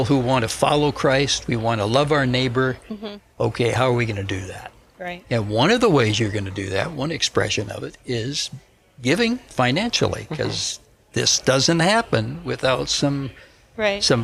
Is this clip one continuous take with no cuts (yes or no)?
yes